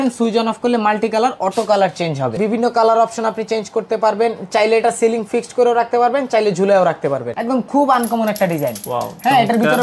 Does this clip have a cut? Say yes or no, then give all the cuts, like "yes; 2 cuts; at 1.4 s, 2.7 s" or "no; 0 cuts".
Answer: yes; 2 cuts; at 2.4 s, 7.3 s